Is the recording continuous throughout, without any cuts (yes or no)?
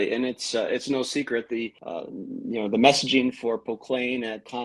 yes